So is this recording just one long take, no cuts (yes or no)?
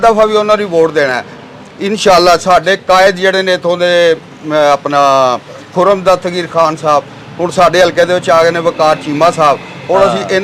yes